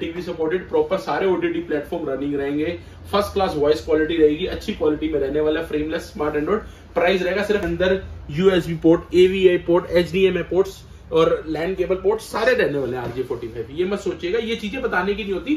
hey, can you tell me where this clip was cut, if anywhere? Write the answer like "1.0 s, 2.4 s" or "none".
7.6 s